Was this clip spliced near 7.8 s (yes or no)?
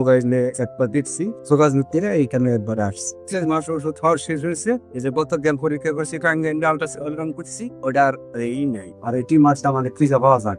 no